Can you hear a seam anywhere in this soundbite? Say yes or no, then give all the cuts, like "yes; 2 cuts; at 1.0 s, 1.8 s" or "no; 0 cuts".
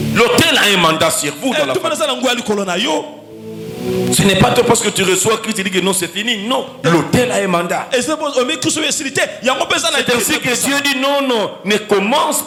no; 0 cuts